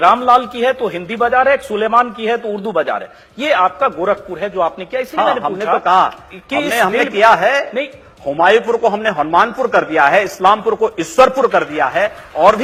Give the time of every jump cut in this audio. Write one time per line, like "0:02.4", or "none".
none